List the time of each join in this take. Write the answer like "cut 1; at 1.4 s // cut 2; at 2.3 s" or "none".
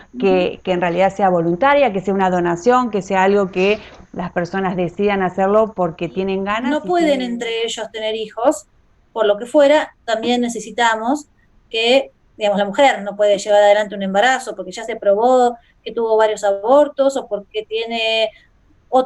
cut 1; at 6.7 s